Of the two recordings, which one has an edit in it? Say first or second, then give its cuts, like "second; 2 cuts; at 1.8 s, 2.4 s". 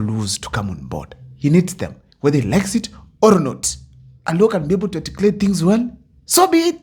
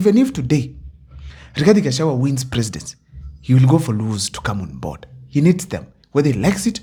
first; 1 cut; at 4.2 s